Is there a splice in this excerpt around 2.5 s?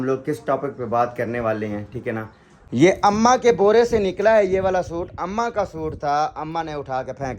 yes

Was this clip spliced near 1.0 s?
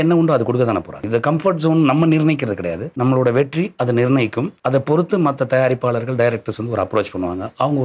yes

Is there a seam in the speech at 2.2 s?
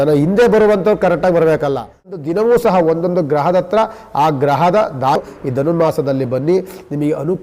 yes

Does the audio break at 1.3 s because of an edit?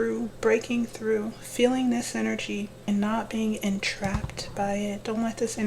no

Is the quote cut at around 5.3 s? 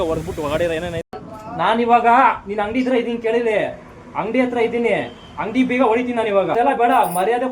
no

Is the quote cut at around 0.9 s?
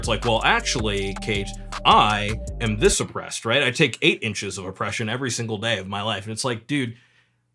no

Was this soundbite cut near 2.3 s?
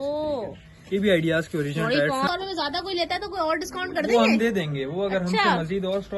yes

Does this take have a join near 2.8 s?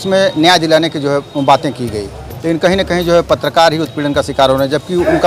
no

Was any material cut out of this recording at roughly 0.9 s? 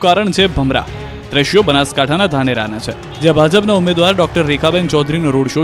no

